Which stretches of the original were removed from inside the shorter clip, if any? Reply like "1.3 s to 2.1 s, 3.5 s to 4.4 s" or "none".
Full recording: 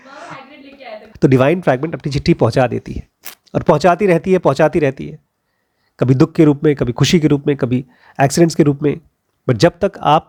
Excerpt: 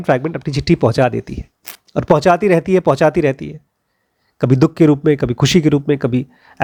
none